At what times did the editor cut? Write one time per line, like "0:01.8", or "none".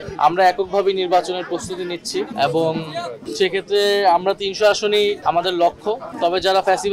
none